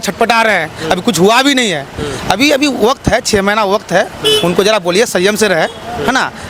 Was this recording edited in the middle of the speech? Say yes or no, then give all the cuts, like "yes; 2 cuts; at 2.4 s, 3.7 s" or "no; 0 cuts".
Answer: no; 0 cuts